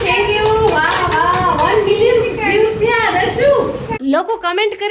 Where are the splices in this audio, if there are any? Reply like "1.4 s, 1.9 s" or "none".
4.0 s